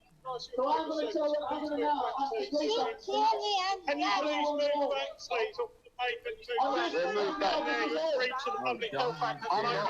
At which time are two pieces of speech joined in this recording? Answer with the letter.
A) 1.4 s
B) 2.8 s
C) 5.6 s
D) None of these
A